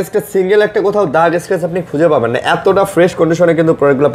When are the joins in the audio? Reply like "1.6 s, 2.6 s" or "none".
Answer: none